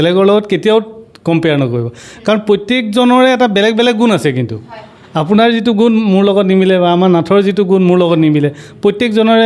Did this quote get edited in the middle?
no; 0 cuts

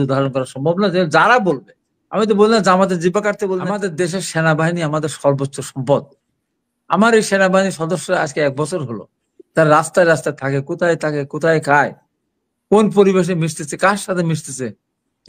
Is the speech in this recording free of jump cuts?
no; 1 cut; at 3.9 s

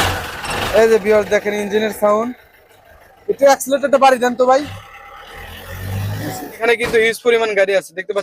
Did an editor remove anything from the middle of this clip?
yes; 1 cut; at 6.6 s

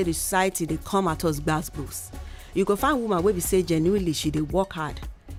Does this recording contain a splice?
no; 0 cuts

